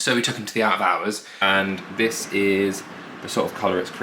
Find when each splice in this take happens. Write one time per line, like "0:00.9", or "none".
0:01.3